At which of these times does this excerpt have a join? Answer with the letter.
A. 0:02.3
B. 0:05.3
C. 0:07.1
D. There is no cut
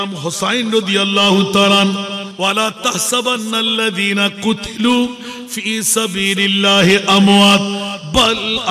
A